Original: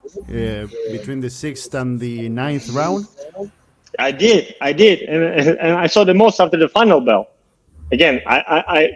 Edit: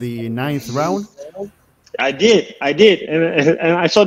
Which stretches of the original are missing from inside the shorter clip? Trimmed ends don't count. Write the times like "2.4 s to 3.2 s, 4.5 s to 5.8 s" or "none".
none